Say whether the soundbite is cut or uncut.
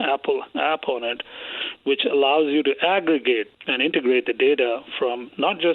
uncut